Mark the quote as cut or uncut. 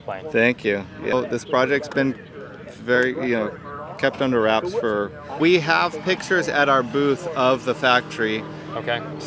cut